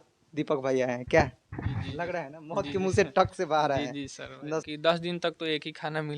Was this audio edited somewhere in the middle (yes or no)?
yes